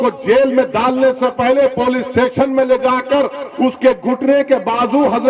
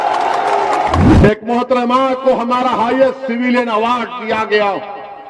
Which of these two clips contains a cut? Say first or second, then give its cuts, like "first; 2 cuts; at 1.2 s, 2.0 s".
second; 1 cut; at 1.0 s